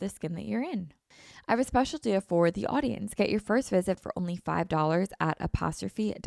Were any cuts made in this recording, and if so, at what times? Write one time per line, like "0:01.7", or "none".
0:01.0

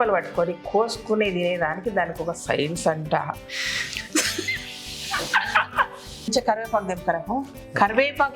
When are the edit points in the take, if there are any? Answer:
0:06.3

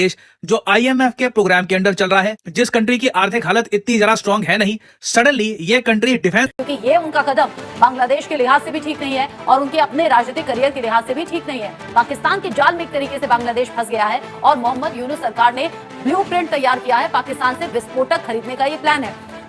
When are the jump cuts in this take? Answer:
0:06.5

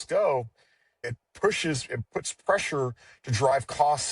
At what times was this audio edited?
0:01.0

